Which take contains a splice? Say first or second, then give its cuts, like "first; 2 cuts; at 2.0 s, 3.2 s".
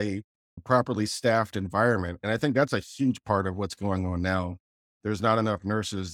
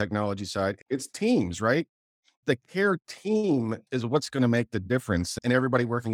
second; 3 cuts; at 0.8 s, 2.4 s, 5.3 s